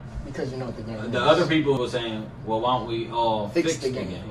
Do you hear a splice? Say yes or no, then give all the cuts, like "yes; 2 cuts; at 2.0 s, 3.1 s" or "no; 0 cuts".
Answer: yes; 1 cut; at 1.8 s